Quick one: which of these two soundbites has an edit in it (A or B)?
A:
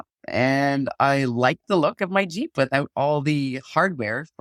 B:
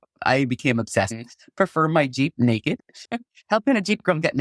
B